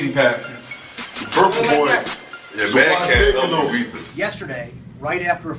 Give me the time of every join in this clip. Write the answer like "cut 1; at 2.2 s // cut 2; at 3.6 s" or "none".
cut 1; at 4.0 s